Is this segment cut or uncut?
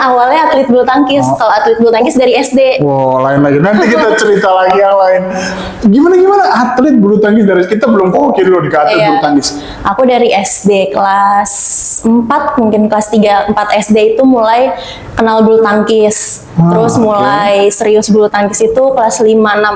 uncut